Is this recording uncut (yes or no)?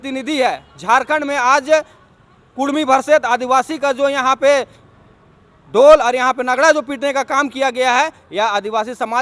yes